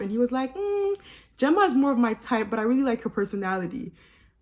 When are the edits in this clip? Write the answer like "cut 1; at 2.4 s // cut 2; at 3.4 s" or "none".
none